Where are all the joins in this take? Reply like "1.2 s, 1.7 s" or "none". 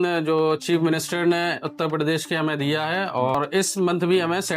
3.3 s

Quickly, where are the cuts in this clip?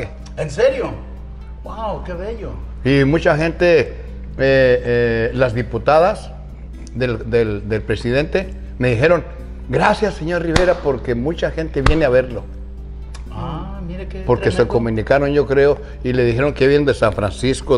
none

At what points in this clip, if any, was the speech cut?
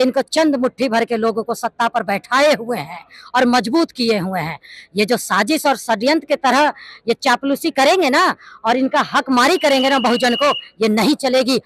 none

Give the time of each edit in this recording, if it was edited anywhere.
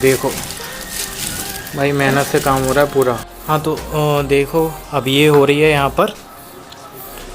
3.3 s

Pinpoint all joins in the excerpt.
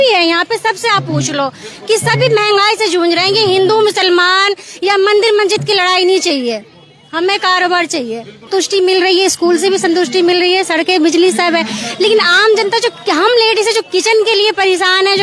8.5 s

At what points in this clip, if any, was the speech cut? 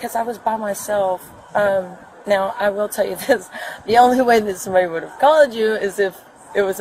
none

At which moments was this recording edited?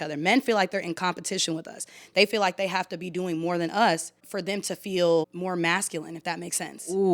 4.3 s, 5.3 s

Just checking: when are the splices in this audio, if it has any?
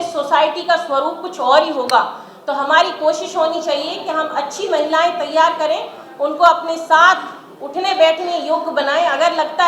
none

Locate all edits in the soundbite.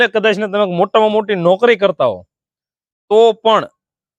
none

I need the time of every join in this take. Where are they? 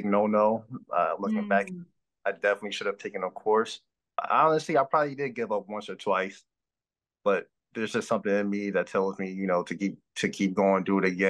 4.2 s

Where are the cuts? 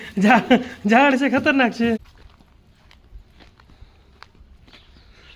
2.0 s

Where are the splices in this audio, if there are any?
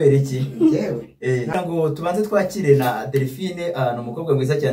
1.5 s

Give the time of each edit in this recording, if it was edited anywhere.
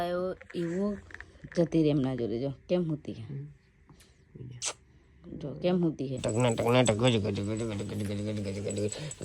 6.2 s

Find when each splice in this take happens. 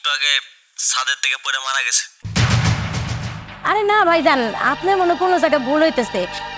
none

